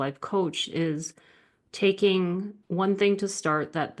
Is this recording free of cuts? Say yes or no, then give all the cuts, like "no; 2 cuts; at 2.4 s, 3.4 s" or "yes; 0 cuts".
yes; 0 cuts